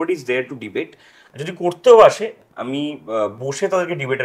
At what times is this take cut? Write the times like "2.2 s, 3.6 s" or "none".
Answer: none